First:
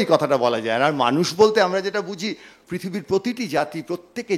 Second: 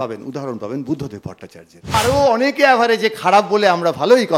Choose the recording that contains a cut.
second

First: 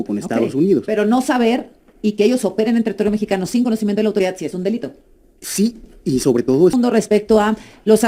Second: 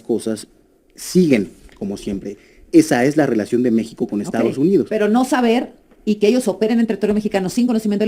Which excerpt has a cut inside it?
first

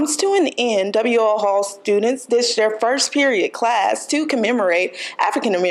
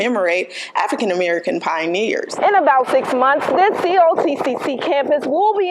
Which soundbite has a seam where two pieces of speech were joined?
second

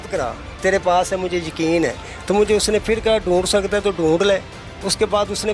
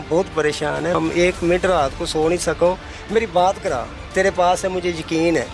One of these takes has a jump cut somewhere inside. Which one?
second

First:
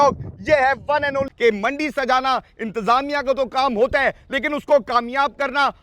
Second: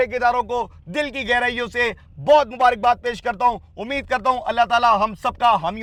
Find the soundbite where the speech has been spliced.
first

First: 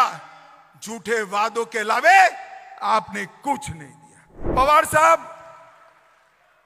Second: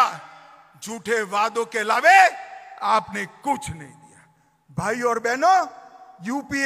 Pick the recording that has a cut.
first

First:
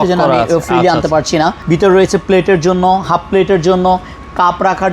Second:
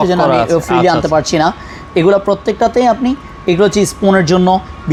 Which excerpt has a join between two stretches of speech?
first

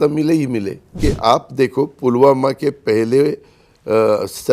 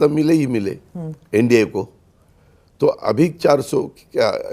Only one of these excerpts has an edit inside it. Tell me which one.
first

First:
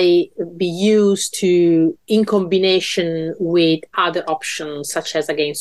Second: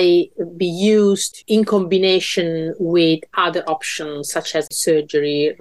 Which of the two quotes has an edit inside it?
second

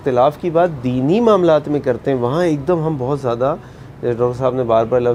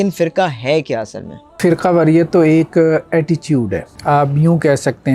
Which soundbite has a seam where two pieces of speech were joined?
second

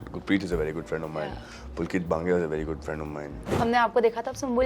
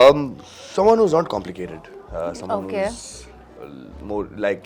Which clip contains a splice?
first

